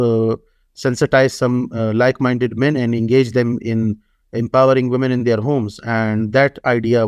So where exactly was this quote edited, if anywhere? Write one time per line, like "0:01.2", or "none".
none